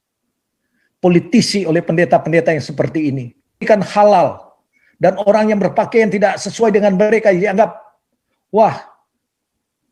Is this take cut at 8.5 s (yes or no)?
no